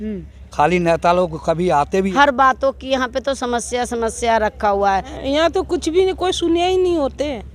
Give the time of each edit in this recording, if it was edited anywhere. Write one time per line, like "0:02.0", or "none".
0:02.1
0:05.1

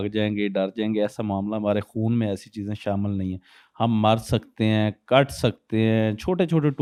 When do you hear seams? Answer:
none

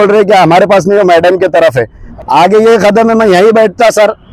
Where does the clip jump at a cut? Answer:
0:02.0

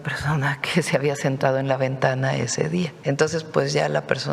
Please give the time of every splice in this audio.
0:02.9

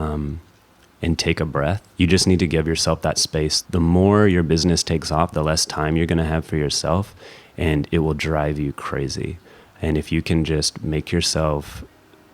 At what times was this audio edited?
0:01.8
0:03.6

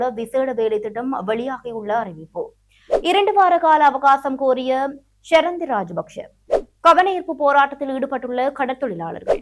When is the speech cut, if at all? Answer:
none

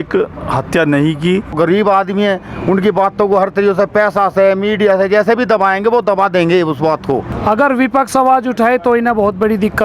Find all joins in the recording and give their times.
0:01.6
0:07.3

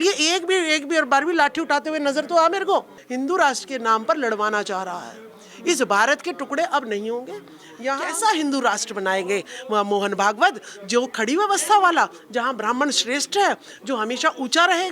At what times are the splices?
0:03.0
0:08.0

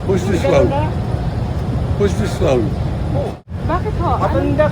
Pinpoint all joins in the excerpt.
0:03.4

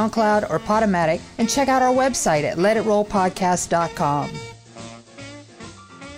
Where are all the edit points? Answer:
0:04.7

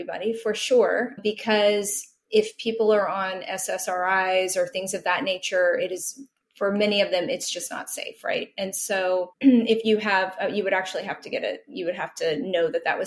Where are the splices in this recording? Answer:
0:01.2

